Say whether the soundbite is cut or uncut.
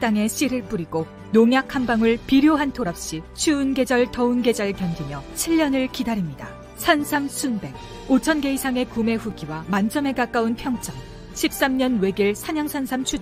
uncut